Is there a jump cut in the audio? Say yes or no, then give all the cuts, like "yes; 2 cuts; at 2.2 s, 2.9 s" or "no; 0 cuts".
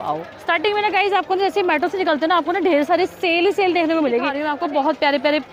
yes; 1 cut; at 4.4 s